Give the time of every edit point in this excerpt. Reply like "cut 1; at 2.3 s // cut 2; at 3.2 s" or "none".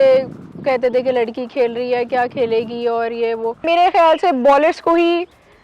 cut 1; at 3.6 s